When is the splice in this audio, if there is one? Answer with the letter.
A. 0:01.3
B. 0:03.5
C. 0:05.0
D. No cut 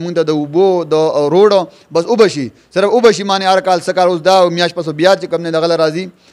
D